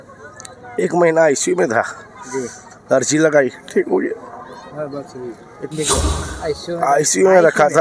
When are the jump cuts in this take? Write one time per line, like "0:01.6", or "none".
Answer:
0:06.0